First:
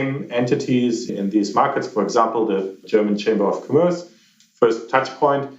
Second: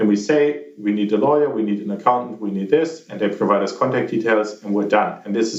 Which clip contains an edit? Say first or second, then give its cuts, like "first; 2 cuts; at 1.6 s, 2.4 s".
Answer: first; 1 cut; at 1.1 s